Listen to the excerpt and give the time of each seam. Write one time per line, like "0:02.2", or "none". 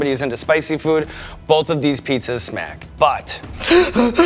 0:03.1